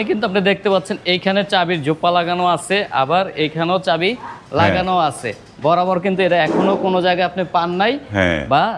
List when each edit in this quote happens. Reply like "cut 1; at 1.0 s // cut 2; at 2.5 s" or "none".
none